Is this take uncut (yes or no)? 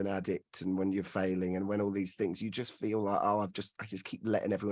yes